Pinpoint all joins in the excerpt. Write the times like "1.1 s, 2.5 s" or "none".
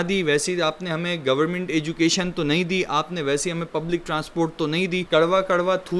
5.0 s

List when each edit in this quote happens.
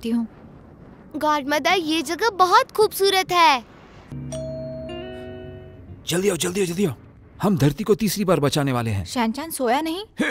4.0 s, 5.7 s

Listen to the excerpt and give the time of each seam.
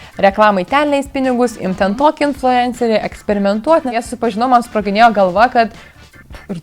4.0 s

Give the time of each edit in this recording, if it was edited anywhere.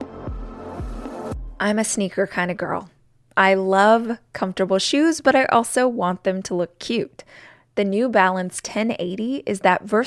1.5 s

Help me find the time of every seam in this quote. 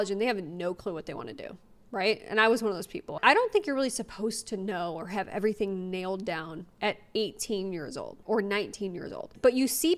none

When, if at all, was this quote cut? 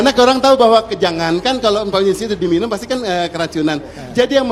none

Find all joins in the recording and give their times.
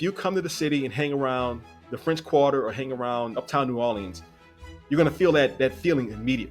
3.3 s

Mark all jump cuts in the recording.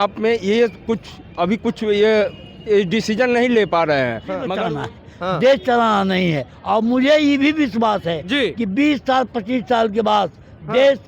4.5 s

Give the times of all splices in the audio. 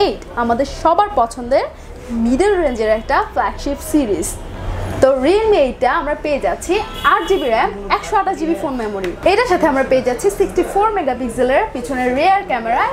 none

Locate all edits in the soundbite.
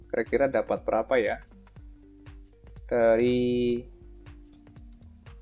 3.9 s

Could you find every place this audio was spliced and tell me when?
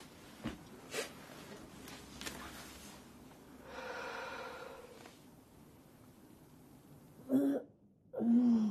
2.9 s

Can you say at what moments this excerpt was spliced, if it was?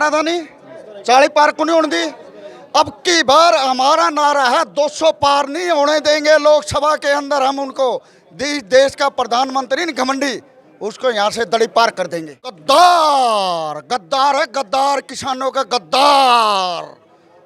12.6 s

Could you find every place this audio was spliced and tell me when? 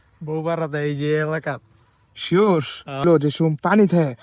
3.0 s

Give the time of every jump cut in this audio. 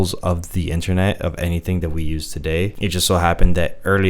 2.7 s

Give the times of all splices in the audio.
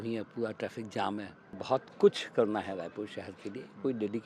1.6 s

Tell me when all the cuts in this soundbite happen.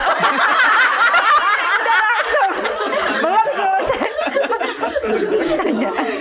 none

